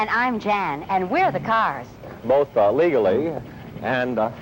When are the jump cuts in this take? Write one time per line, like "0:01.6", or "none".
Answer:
none